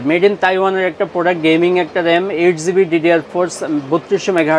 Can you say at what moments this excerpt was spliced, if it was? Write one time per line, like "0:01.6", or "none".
none